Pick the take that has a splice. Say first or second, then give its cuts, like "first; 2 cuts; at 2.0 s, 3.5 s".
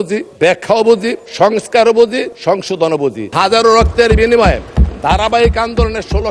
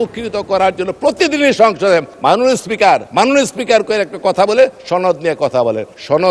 first; 1 cut; at 3.3 s